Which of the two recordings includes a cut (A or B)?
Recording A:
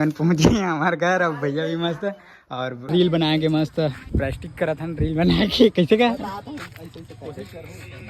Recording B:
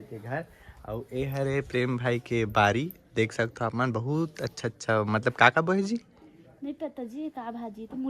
A